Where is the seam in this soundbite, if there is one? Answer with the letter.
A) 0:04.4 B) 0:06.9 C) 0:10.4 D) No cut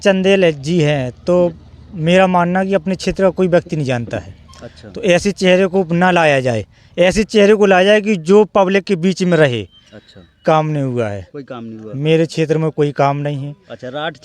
C